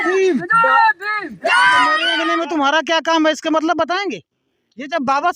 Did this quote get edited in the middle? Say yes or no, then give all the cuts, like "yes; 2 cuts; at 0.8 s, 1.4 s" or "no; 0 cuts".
yes; 1 cut; at 2.2 s